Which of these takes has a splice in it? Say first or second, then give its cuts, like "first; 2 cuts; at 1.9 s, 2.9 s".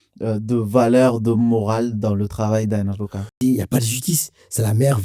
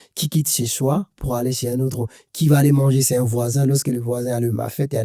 first; 1 cut; at 3.3 s